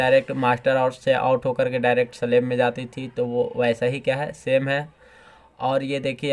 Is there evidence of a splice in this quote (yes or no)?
no